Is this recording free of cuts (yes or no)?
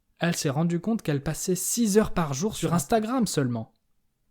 no